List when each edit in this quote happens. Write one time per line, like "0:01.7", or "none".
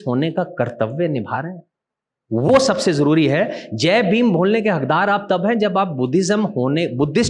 none